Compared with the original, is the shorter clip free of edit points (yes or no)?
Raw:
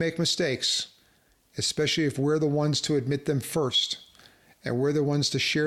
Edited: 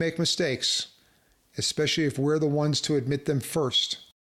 yes